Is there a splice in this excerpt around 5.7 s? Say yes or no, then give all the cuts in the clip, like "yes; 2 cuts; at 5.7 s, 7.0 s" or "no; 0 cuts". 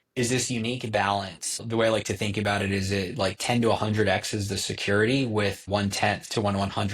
yes; 2 cuts; at 1.6 s, 5.7 s